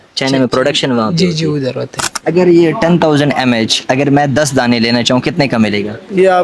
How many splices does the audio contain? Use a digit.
1